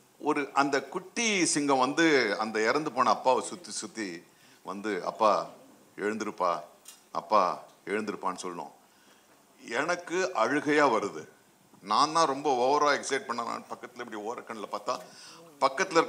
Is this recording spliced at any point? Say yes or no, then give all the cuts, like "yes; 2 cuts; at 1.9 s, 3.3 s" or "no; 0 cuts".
no; 0 cuts